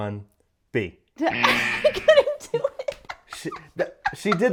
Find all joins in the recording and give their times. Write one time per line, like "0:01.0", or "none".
none